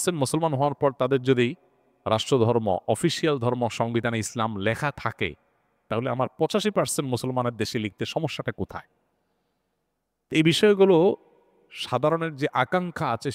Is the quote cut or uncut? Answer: uncut